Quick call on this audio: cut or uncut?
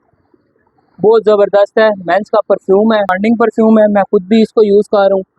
cut